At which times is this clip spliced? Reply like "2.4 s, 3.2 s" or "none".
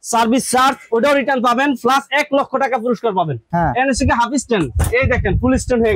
3.4 s